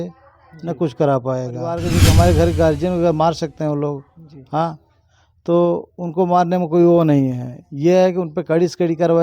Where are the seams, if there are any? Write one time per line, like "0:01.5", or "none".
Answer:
0:01.9